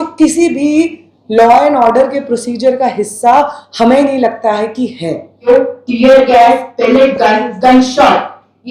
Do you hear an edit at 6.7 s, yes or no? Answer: no